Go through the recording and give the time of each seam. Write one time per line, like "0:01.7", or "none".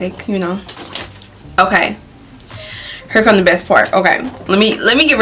0:00.9